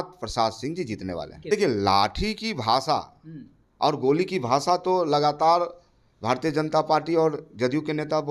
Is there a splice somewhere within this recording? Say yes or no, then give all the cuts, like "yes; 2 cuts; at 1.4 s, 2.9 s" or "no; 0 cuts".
yes; 1 cut; at 1.3 s